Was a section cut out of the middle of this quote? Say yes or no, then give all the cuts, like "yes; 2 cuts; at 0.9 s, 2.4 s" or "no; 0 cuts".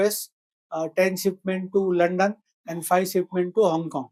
no; 0 cuts